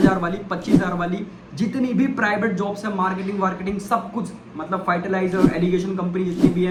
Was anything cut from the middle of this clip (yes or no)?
no